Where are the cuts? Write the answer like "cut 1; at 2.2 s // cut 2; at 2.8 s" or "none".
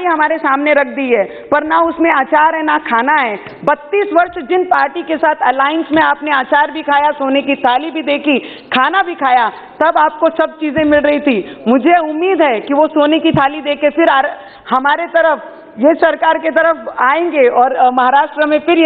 none

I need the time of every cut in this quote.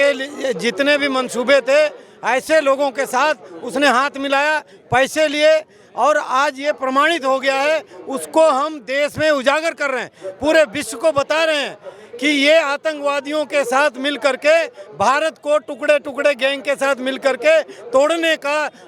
none

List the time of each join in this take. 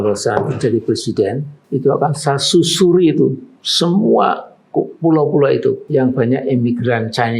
cut 1; at 1.5 s // cut 2; at 5.8 s

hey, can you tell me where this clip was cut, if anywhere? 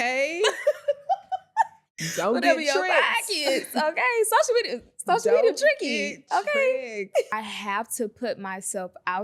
cut 1; at 7.3 s

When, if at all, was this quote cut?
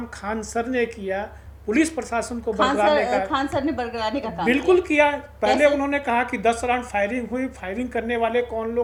none

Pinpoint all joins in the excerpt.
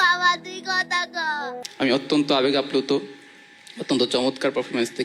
cut 1; at 1.6 s

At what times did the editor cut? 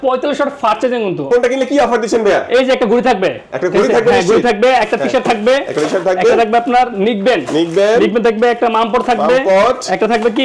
cut 1; at 1.3 s

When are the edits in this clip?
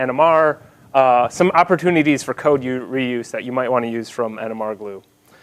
cut 1; at 2.6 s

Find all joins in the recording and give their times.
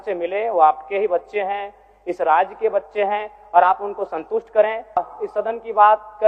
cut 1; at 5.0 s

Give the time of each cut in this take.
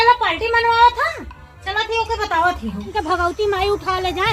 cut 1; at 2.9 s

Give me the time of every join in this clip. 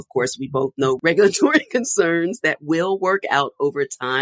cut 1; at 1.0 s

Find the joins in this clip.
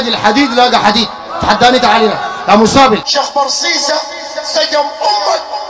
cut 1; at 3.1 s

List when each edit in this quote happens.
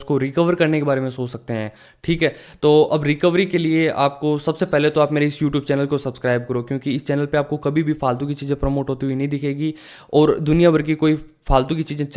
none

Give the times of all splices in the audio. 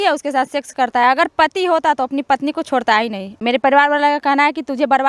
cut 1; at 3.3 s

